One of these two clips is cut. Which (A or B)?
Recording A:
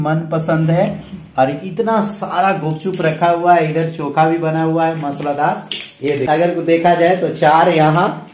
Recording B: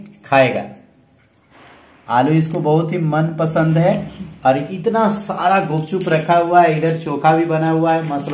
A